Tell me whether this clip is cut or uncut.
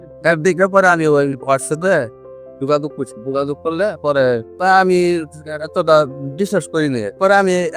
uncut